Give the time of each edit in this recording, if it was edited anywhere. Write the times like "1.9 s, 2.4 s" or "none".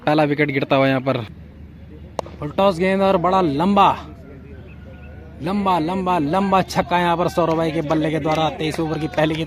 1.4 s